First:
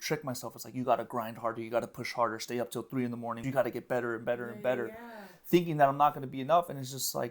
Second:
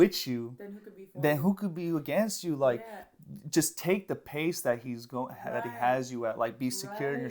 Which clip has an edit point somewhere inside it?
first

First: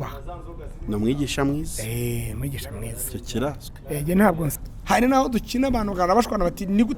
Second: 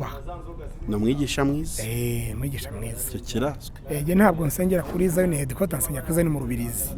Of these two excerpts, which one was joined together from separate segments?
first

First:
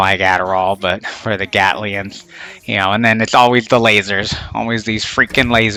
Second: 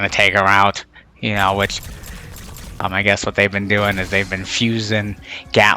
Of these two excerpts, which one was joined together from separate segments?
second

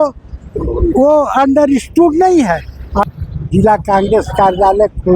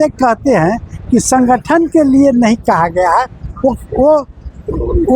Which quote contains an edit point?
first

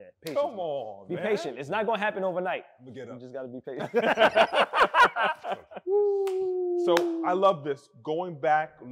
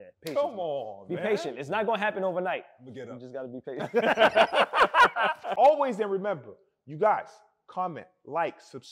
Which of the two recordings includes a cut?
second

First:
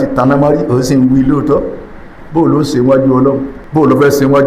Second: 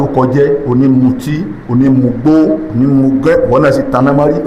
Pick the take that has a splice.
first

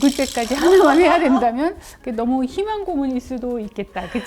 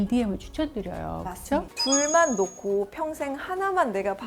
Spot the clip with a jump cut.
second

